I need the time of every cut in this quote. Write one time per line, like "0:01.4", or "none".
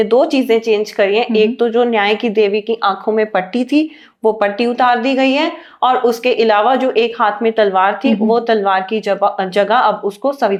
none